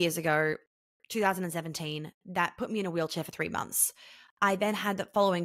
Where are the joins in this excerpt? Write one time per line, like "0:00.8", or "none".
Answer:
none